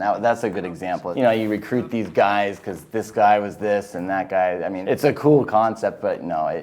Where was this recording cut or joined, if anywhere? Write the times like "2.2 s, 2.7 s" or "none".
1.1 s, 4.8 s